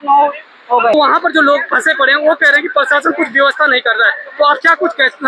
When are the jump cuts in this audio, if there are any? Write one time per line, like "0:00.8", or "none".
0:00.9